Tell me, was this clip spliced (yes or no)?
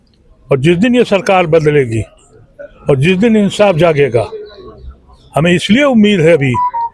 no